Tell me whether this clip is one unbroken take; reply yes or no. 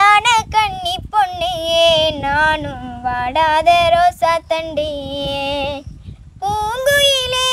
yes